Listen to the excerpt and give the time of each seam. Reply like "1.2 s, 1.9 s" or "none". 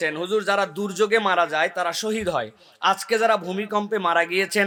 none

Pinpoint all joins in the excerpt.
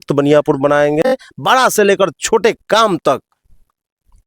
1.3 s

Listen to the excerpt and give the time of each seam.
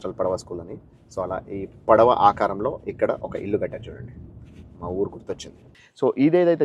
5.7 s

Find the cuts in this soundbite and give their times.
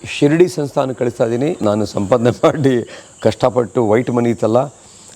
1.6 s

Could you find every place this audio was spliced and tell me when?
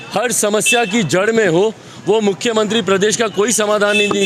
none

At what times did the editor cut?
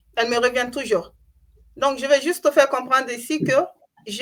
none

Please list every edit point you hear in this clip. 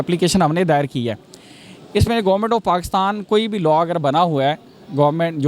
none

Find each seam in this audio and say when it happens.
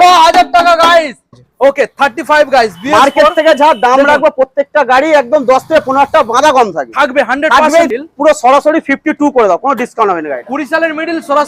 1.4 s, 7.9 s

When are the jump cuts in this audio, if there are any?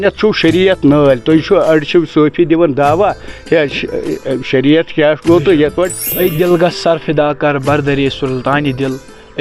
6.0 s

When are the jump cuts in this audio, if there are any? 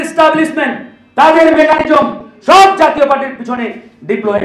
none

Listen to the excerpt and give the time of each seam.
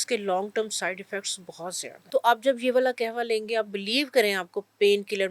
1.9 s

